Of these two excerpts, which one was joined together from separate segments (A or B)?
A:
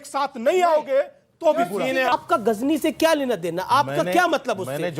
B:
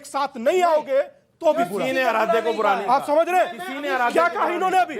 A